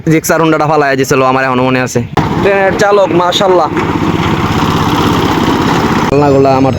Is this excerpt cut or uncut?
cut